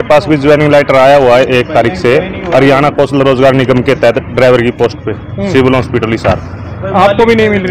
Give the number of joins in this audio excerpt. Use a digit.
0